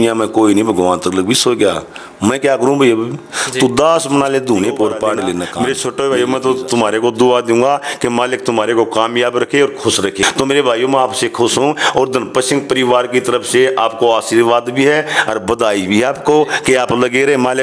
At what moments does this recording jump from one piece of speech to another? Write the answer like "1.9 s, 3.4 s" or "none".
5.5 s, 10.2 s